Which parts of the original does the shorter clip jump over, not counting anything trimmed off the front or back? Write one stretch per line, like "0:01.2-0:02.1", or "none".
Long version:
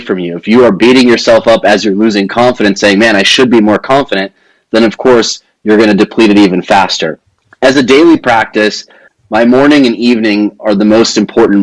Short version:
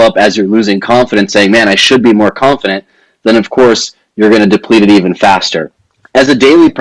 none